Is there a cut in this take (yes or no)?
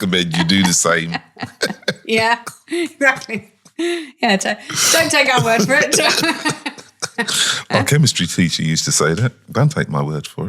no